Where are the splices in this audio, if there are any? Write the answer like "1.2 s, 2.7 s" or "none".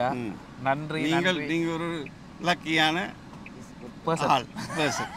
none